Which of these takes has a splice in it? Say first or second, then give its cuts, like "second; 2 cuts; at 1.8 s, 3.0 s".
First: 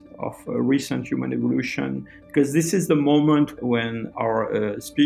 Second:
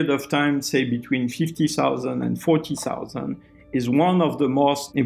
first; 1 cut; at 3.5 s